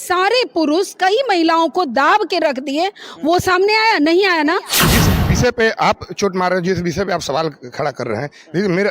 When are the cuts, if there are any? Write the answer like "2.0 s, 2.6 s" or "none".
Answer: 4.9 s